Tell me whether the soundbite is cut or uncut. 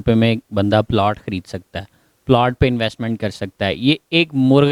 uncut